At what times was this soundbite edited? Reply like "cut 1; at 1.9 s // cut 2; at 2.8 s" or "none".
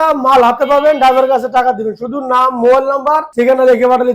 cut 1; at 3.3 s